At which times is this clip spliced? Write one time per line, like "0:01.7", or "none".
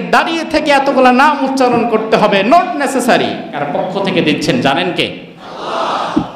0:03.6